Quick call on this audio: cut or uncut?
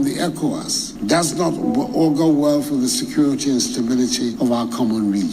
cut